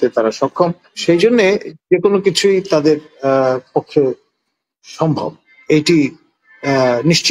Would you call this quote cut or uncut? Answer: cut